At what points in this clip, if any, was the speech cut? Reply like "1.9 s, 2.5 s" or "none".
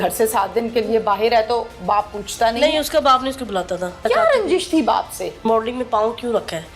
4.0 s, 5.4 s